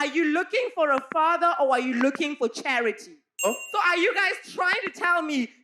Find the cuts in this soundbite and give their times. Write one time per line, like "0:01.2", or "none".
0:03.4